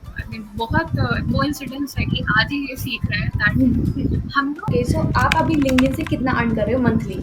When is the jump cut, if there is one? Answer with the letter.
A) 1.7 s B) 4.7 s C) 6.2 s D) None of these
B